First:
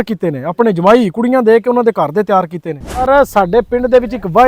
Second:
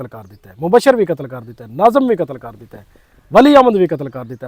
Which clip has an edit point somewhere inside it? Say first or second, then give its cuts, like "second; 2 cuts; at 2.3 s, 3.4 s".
first; 1 cut; at 3.0 s